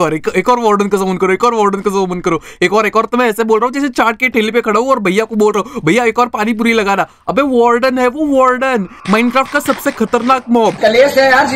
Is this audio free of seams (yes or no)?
yes